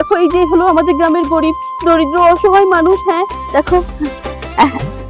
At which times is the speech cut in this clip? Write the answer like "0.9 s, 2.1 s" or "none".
none